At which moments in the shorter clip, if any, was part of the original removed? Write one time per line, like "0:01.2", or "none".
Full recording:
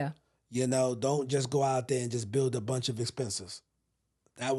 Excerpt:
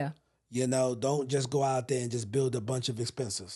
none

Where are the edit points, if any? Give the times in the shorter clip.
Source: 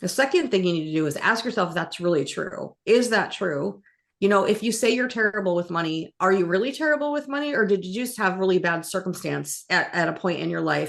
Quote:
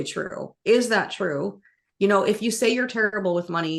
none

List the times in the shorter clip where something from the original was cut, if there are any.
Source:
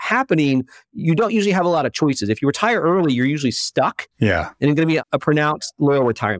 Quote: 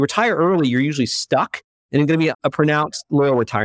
0:01.7

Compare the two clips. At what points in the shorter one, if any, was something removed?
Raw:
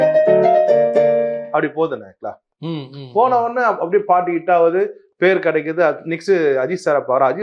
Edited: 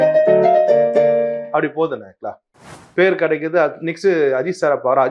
0:02.8

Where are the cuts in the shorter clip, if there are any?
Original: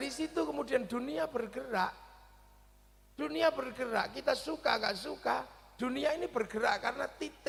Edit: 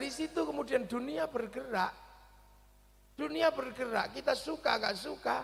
none

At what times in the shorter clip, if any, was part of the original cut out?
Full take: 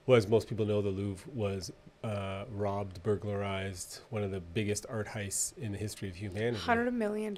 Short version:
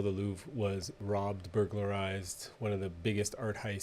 0:00.9

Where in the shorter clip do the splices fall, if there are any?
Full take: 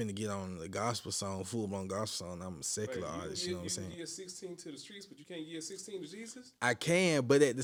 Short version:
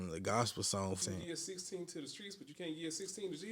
0:01.0

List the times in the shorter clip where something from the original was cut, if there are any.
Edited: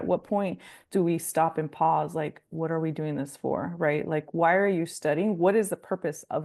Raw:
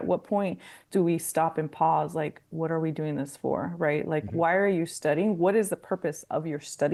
none

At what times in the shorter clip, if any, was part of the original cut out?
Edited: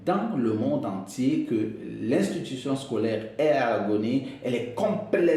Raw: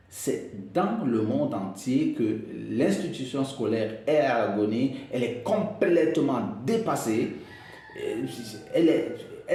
none

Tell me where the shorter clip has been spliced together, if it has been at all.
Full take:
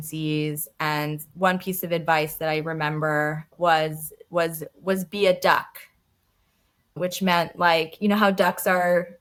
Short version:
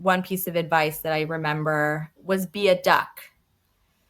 0:02.1

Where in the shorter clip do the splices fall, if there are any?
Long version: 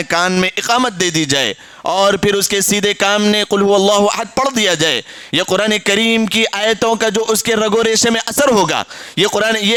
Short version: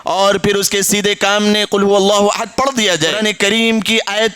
0:03.2

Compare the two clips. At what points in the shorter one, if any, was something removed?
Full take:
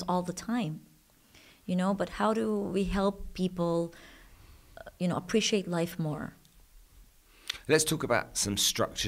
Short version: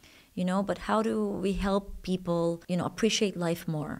0:02.6

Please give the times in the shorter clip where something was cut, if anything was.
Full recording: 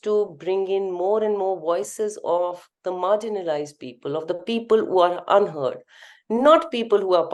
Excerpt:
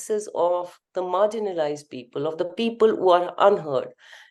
none

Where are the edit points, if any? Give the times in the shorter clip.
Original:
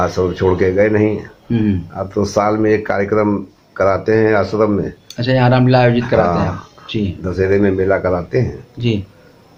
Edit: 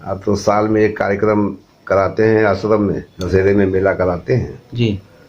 0:03.1

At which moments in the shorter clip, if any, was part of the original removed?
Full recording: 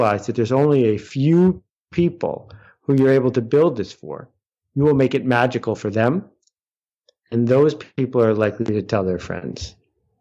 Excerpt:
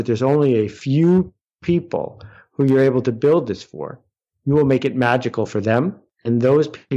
0:06.1

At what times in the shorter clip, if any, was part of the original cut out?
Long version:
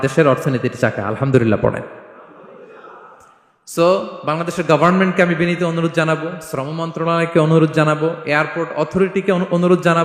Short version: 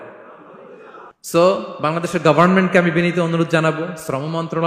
0:01.1

